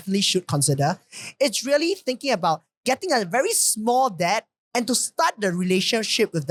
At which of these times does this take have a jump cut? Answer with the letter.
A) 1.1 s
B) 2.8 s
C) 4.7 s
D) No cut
D